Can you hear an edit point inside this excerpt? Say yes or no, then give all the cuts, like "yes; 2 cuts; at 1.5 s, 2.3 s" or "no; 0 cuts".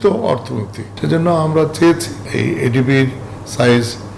yes; 2 cuts; at 0.9 s, 2.2 s